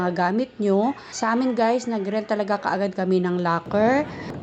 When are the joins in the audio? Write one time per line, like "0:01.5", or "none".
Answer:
0:01.1